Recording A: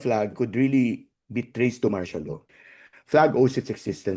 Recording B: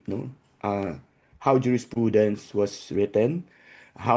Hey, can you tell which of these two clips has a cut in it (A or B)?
A